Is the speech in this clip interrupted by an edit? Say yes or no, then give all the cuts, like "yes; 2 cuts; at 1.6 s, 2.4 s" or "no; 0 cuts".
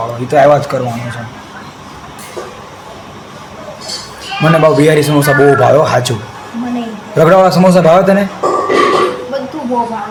no; 0 cuts